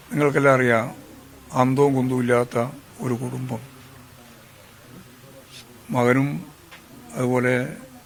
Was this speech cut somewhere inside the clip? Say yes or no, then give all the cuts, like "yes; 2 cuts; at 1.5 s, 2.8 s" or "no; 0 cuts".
no; 0 cuts